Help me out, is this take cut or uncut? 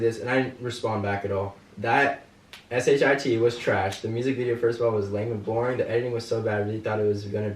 cut